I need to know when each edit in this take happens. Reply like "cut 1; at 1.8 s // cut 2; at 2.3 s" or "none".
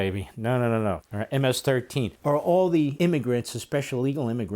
cut 1; at 1.1 s // cut 2; at 2.1 s // cut 3; at 2.9 s